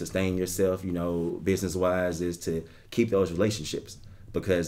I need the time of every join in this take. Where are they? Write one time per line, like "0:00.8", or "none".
none